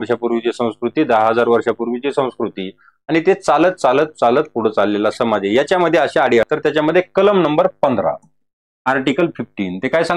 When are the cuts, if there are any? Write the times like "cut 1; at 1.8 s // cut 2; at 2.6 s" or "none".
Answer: cut 1; at 6.5 s

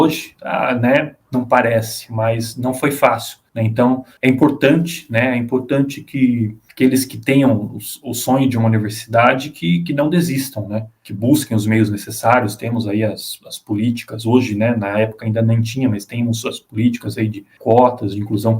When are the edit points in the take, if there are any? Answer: cut 1; at 6.6 s

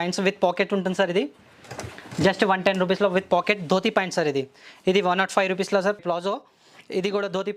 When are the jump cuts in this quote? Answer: none

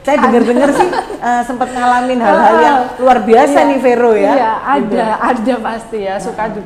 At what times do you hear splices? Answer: none

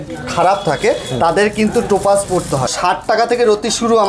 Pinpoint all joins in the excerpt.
cut 1; at 2.7 s

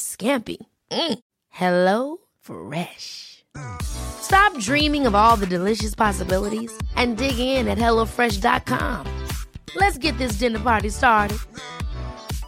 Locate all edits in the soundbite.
none

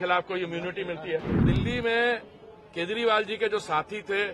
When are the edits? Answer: cut 1; at 1.4 s

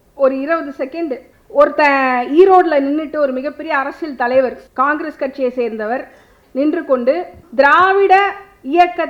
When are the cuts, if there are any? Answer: cut 1; at 1.3 s // cut 2; at 4.6 s // cut 3; at 7.4 s

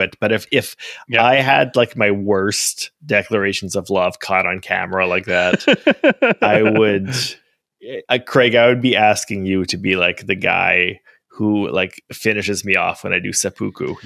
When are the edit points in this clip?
none

